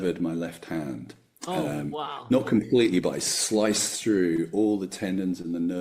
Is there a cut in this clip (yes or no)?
no